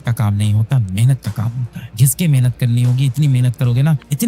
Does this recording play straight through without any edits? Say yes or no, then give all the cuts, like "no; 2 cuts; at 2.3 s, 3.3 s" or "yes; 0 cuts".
no; 1 cut; at 1.9 s